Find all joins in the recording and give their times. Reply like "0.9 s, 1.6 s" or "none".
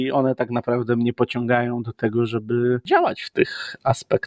3.2 s